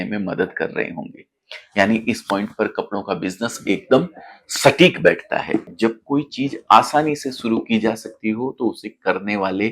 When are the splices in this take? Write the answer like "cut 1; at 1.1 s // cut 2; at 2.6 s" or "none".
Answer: cut 1; at 5.7 s